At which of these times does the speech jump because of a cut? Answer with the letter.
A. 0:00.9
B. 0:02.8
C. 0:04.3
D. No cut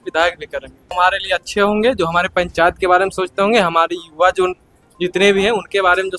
A